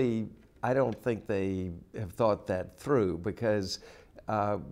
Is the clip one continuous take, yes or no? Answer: no